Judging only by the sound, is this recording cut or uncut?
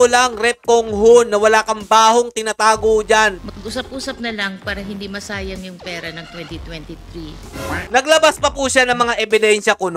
cut